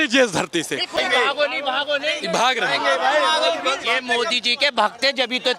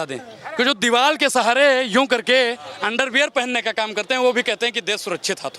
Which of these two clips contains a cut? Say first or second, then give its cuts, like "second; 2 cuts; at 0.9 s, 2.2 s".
first; 1 cut; at 1.0 s